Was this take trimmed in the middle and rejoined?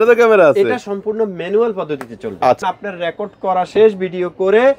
yes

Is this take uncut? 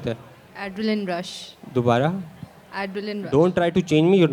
yes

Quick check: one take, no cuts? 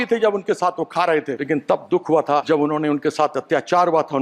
no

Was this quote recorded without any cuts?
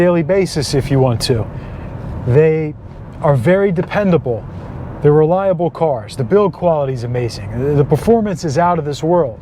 yes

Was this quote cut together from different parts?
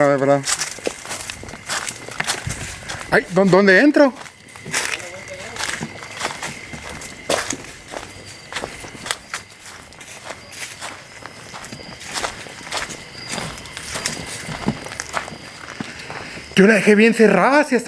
no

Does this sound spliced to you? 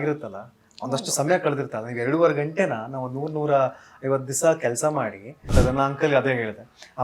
yes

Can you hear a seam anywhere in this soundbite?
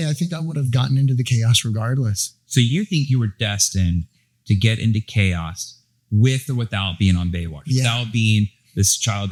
no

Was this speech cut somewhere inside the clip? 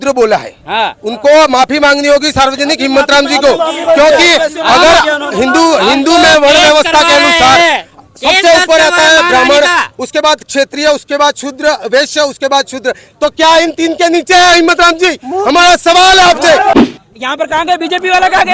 yes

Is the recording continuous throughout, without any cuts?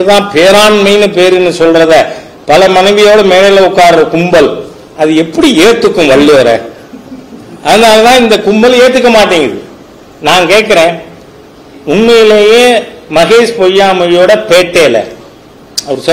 yes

